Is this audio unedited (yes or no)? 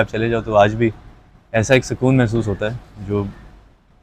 yes